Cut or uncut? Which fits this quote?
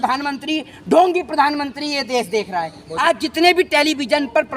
cut